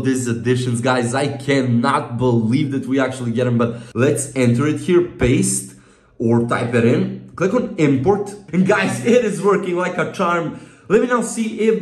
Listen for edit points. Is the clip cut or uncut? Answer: cut